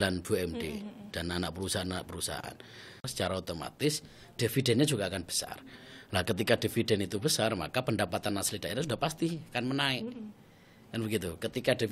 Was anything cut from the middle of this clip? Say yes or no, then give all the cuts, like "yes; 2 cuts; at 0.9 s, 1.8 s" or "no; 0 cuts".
yes; 1 cut; at 3.1 s